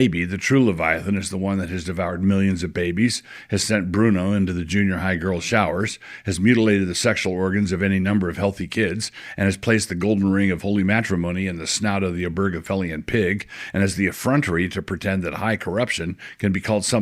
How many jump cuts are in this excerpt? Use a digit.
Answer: 0